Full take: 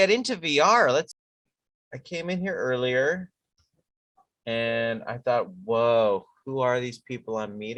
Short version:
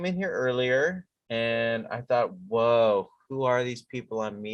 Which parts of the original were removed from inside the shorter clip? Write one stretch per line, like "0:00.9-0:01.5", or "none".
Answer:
0:03.4-0:04.3